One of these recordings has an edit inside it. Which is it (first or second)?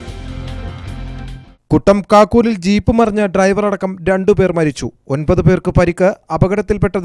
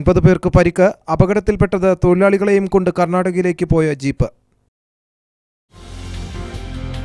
first